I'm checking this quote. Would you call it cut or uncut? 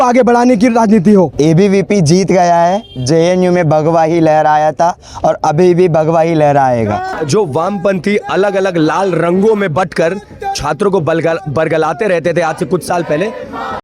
cut